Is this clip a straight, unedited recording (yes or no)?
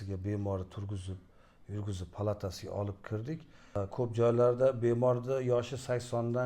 no